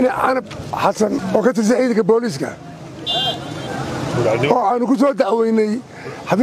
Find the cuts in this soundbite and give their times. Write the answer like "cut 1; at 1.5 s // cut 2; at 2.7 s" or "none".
cut 1; at 1.2 s